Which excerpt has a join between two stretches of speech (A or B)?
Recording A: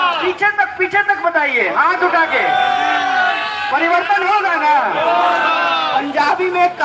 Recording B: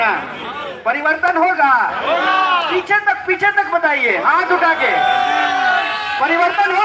A